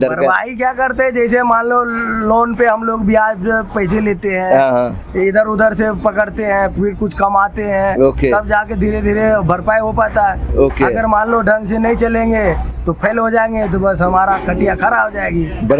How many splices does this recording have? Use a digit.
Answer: 0